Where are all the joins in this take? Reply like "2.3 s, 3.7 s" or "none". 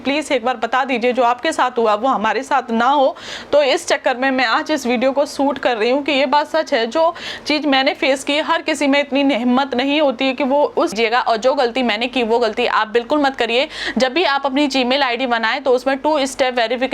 10.9 s